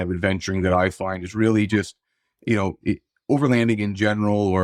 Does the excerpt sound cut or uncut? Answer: uncut